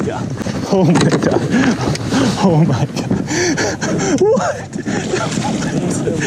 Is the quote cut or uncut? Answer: uncut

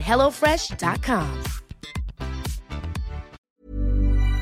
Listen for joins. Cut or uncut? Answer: cut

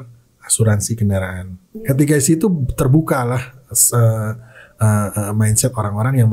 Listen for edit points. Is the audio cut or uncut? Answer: cut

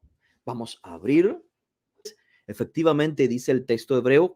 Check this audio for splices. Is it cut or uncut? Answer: cut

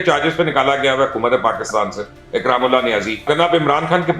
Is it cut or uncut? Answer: cut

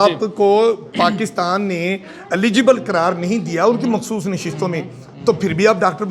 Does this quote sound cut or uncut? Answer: uncut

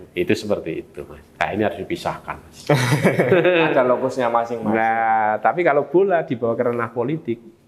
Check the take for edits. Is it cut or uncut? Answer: uncut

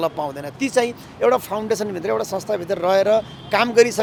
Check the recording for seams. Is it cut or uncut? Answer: uncut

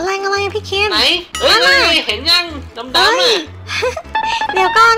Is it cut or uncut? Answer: uncut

